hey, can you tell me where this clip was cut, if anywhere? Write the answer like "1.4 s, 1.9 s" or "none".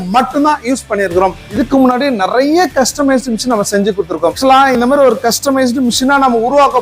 1.4 s, 4.4 s